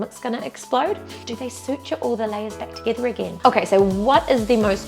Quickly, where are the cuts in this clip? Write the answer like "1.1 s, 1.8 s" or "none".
1.2 s, 3.3 s